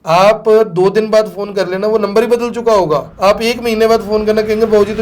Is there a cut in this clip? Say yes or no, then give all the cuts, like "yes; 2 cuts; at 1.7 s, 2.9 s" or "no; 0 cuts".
yes; 1 cut; at 3.1 s